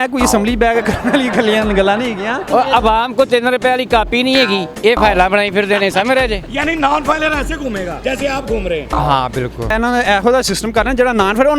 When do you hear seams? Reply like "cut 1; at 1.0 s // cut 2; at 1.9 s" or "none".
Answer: cut 1; at 2.5 s // cut 2; at 4.7 s // cut 3; at 6.4 s // cut 4; at 8.0 s // cut 5; at 9.7 s